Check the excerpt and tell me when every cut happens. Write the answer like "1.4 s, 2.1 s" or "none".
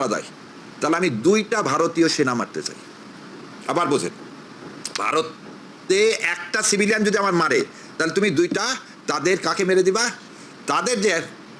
none